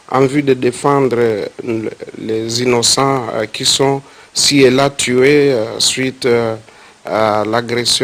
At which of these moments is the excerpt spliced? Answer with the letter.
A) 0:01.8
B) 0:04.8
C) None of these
A